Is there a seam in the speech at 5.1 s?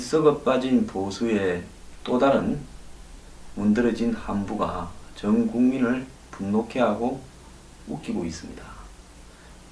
no; 1 cut; at 2.3 s

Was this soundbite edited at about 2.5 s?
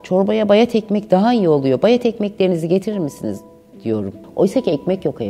no; 1 cut; at 4.2 s

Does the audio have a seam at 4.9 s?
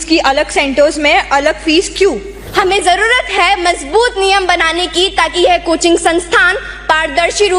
no; 1 cut; at 2.3 s

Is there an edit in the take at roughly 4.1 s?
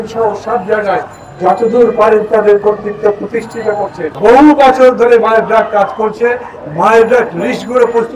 yes; 1 cut; at 4.1 s

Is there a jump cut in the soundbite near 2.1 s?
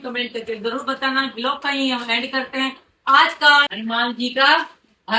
no; 1 cut; at 3.7 s

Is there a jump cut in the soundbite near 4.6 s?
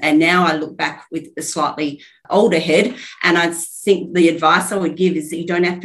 no; 1 cut; at 2.2 s

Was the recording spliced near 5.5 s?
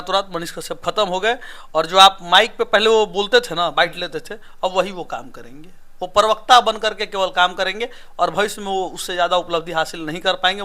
no; 0 cuts

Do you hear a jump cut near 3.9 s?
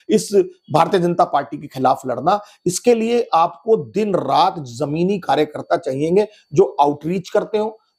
no; 0 cuts

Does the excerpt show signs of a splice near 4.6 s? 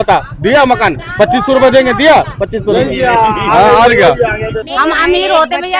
yes; 1 cut; at 4.6 s

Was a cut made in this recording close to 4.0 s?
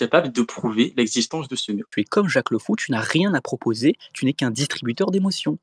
no; 1 cut; at 1.9 s

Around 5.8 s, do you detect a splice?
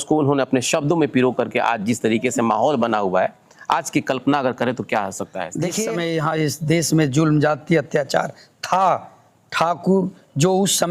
yes; 1 cut; at 5.8 s

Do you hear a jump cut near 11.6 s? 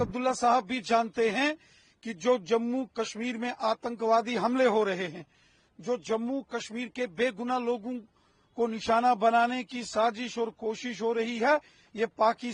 no; 0 cuts

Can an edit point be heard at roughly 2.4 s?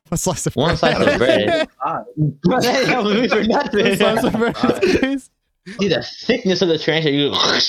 no; 1 cut; at 5.8 s

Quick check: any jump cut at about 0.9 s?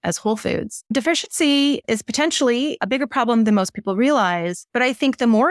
yes; 4 cuts; at 0.9 s, 1.8 s, 2.8 s, 4.6 s

